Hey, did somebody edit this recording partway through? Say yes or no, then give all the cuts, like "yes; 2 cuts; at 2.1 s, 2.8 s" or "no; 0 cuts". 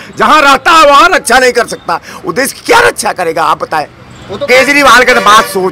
yes; 1 cut; at 4.5 s